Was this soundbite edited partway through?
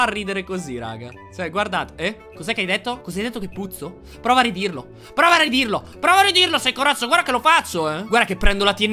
no; 0 cuts

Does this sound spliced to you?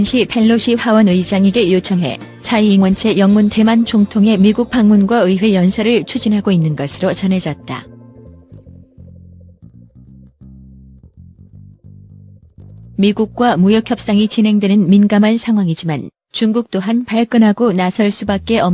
no; 0 cuts

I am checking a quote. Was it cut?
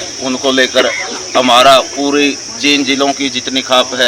no; 0 cuts

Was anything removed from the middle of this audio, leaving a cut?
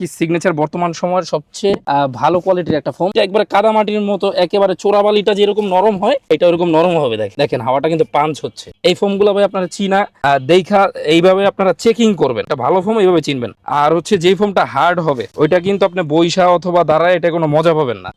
no; 0 cuts

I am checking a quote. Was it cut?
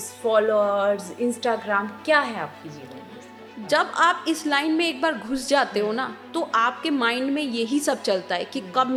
no; 0 cuts

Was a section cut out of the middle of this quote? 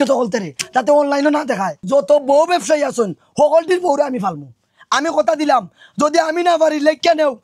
yes; 1 cut; at 1.7 s

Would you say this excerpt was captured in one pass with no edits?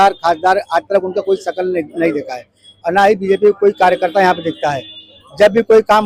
yes; 0 cuts

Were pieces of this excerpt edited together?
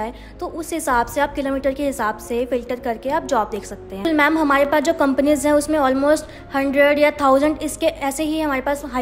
yes; 1 cut; at 4.0 s

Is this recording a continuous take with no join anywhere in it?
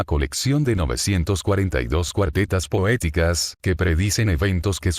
no; 1 cut; at 3.9 s

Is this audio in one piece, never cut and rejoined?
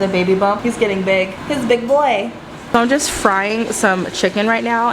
no; 2 cuts; at 1.4 s, 2.5 s

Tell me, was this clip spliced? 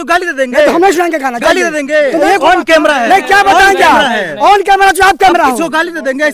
yes; 1 cut; at 2.2 s

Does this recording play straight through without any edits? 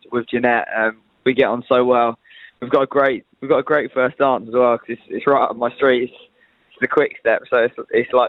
yes; 0 cuts

